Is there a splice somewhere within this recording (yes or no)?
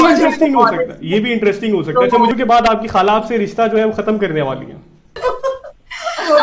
yes